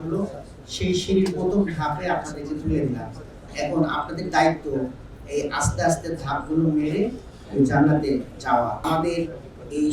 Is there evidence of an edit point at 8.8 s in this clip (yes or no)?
yes